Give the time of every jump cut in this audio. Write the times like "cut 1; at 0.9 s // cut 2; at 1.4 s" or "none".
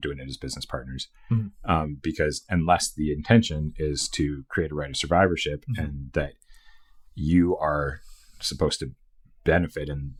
none